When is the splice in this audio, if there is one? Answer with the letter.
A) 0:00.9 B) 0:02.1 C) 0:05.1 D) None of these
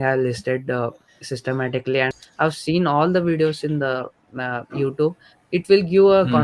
B